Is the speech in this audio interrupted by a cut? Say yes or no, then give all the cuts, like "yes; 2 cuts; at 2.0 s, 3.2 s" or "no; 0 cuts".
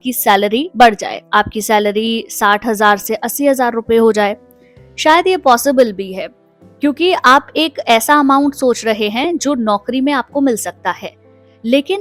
no; 0 cuts